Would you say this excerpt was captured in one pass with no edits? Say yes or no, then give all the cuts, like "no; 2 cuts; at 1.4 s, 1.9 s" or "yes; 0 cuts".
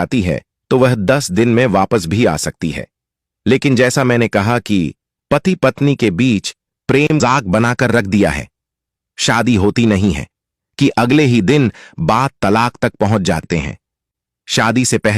no; 2 cuts; at 7.2 s, 13.4 s